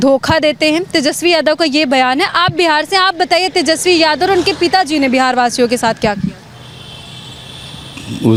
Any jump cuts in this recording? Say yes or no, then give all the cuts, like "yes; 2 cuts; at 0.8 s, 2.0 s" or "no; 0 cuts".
no; 0 cuts